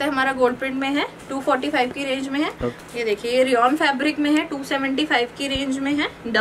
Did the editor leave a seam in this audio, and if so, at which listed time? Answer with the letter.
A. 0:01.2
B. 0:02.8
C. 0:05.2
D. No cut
B